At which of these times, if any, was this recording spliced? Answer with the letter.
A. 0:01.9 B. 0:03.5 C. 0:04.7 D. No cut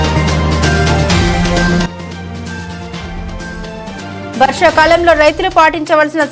D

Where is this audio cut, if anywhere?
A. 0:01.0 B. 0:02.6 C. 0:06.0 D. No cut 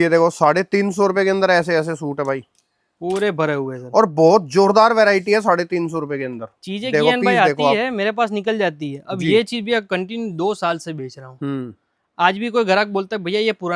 D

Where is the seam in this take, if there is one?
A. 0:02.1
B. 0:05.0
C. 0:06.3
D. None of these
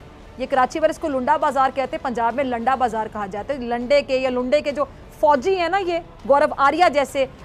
D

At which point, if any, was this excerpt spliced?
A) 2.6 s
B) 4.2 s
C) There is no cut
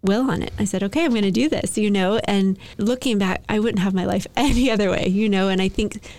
C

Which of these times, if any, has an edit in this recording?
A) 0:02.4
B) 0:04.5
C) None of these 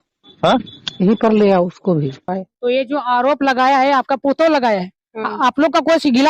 A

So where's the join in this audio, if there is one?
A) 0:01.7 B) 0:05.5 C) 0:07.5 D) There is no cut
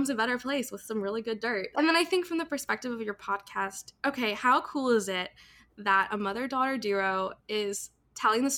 A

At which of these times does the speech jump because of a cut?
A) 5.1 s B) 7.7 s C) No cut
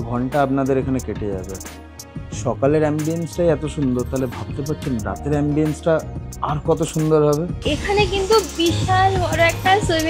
B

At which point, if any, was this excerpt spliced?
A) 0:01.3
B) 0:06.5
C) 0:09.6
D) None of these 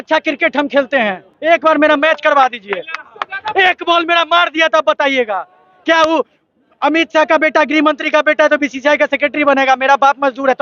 A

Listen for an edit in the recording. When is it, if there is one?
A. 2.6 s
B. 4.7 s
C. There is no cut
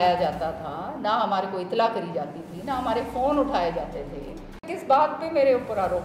B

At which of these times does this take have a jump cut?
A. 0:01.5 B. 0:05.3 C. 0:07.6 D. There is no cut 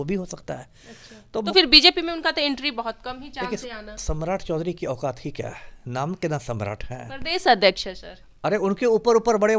A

